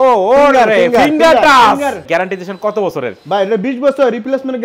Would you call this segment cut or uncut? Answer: cut